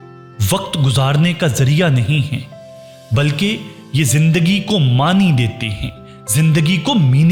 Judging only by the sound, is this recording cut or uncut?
uncut